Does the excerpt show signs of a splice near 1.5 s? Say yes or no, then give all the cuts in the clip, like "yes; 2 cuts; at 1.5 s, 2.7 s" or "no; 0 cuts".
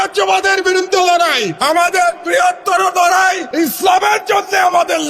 yes; 2 cuts; at 1.5 s, 3.4 s